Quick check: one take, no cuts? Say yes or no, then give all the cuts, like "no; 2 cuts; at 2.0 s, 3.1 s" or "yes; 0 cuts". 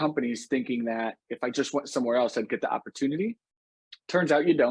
yes; 0 cuts